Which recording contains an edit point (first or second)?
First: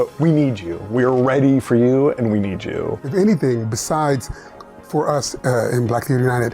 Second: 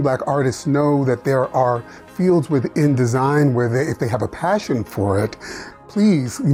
first